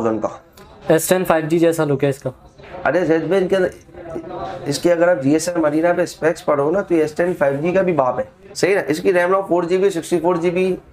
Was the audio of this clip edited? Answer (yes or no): yes